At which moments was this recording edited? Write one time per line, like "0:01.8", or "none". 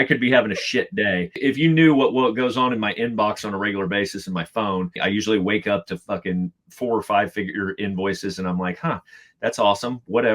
0:01.4
0:04.9